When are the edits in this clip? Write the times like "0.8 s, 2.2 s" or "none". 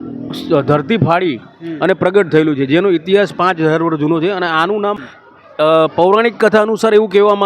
5.0 s

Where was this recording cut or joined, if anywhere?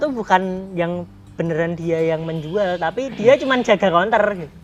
none

